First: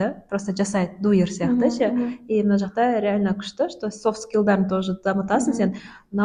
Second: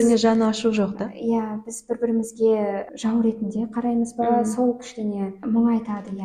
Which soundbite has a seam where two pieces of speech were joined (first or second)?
second